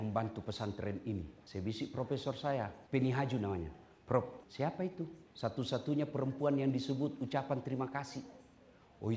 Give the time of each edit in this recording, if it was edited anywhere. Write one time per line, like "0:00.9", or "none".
0:01.4
0:02.8
0:04.9